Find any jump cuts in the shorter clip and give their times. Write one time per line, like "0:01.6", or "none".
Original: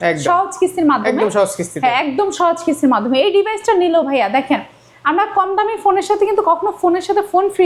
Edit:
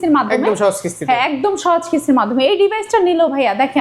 none